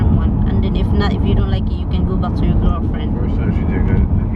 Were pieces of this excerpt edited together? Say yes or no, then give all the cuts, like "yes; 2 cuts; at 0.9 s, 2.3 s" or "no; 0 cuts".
no; 0 cuts